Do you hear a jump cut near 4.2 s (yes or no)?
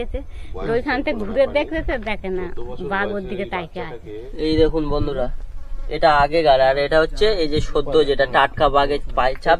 yes